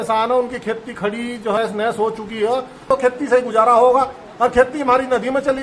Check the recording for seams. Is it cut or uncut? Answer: cut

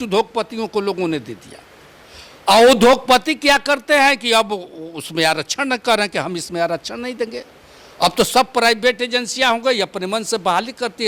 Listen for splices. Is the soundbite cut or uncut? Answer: uncut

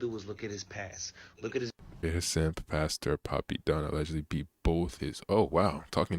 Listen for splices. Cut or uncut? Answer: cut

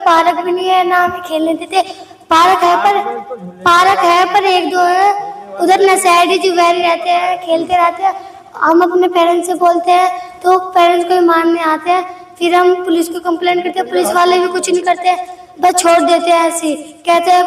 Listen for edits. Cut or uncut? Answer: uncut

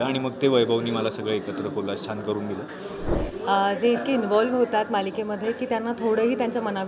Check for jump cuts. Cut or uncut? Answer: cut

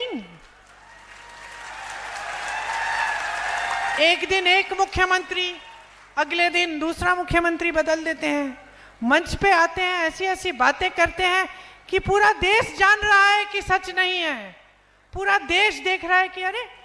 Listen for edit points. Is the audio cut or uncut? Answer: uncut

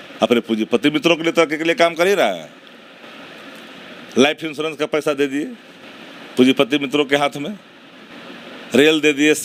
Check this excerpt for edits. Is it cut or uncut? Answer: uncut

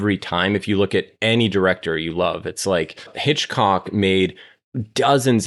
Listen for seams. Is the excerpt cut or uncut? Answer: cut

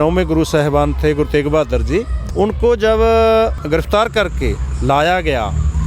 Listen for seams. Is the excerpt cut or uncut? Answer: cut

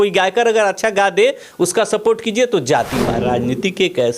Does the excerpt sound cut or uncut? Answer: cut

